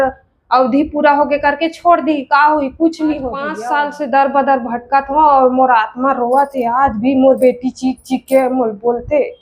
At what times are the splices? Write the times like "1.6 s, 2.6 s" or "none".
3.5 s